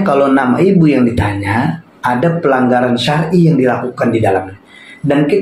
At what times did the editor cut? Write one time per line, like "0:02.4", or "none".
none

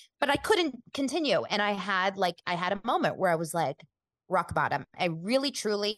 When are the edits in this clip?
none

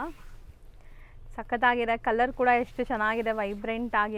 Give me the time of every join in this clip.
none

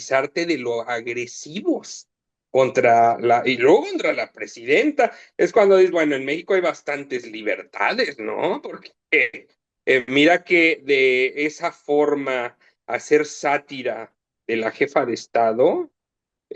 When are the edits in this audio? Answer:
none

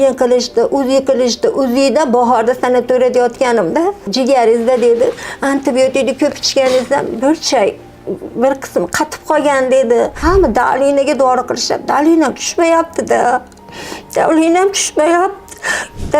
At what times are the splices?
0:04.1
0:10.2

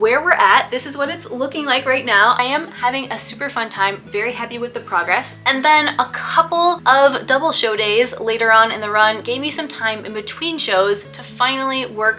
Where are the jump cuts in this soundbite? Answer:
0:02.4
0:05.3
0:06.8

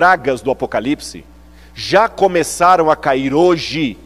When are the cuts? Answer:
none

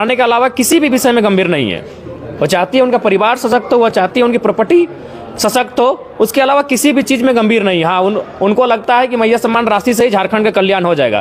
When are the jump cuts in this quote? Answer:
none

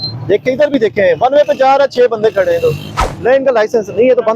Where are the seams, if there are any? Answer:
none

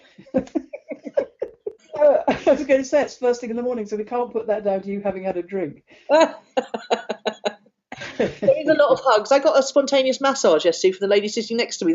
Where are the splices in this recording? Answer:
0:01.8

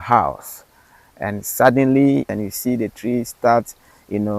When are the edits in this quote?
0:02.3

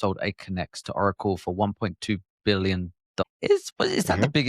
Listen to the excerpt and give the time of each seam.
0:03.2

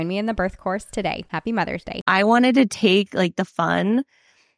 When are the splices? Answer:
0:02.1

